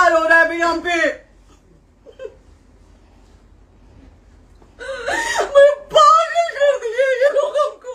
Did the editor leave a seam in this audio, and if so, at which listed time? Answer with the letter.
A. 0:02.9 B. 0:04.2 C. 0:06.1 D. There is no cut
D